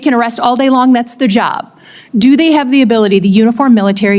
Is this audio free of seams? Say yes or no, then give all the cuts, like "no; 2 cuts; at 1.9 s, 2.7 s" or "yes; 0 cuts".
yes; 0 cuts